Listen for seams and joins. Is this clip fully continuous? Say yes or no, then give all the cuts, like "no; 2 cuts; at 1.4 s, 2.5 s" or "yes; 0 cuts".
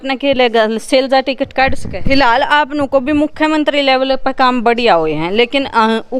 no; 1 cut; at 2.0 s